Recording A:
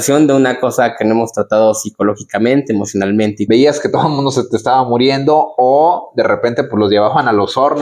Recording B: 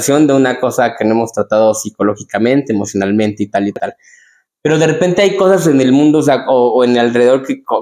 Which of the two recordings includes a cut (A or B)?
A